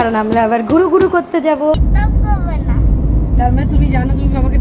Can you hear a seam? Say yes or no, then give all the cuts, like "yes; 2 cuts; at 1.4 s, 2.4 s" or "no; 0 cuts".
yes; 1 cut; at 1.9 s